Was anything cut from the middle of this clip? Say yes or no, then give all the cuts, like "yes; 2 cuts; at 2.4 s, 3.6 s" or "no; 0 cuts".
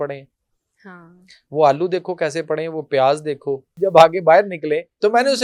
yes; 1 cut; at 3.7 s